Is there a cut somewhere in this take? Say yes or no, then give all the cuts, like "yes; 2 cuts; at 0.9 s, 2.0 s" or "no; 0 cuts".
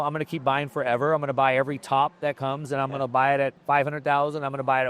yes; 1 cut; at 3.6 s